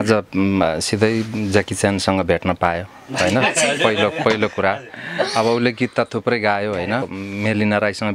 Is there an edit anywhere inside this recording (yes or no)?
yes